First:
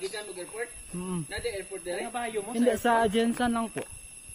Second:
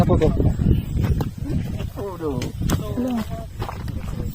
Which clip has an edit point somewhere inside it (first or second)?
second